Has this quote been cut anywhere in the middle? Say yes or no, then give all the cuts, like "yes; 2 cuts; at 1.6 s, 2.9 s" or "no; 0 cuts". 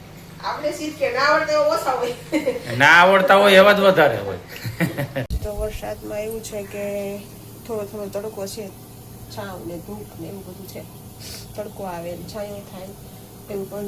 yes; 1 cut; at 5.4 s